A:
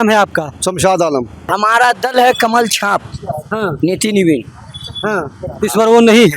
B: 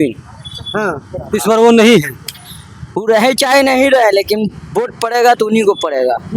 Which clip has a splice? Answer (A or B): A